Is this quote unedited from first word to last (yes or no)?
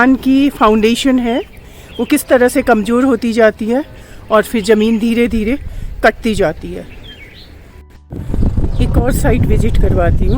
no